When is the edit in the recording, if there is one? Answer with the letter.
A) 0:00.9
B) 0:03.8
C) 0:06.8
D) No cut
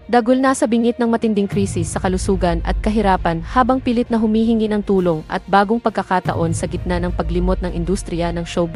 D